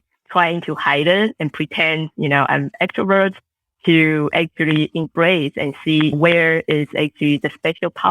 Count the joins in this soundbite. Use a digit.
1